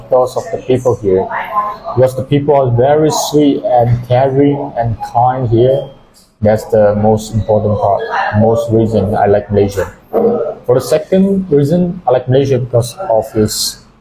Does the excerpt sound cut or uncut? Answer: uncut